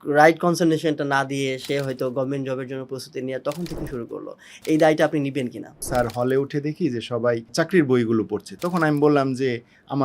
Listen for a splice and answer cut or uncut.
cut